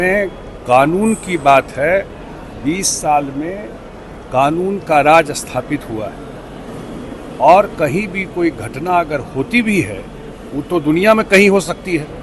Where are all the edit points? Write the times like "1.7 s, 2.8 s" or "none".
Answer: none